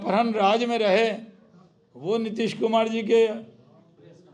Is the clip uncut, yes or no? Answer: yes